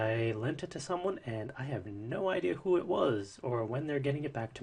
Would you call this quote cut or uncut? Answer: uncut